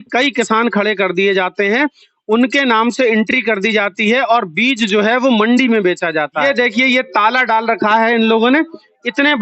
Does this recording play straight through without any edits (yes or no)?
no